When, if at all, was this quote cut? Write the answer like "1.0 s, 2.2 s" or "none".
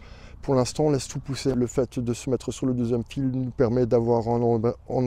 1.5 s